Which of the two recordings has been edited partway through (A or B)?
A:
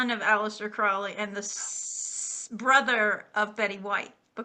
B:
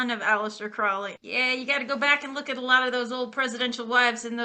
B